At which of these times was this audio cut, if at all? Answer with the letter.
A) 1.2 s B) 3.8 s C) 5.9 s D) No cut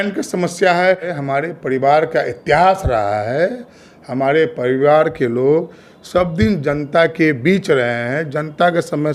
A